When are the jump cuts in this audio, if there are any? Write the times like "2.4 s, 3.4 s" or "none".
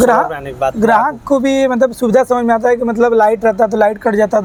none